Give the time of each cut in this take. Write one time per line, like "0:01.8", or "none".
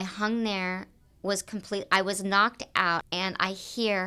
0:03.0